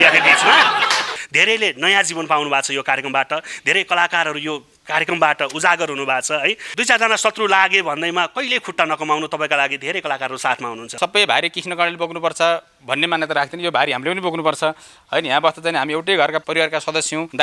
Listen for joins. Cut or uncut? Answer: cut